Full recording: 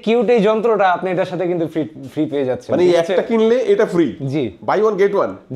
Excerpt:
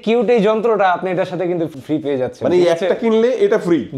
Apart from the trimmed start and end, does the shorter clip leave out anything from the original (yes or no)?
yes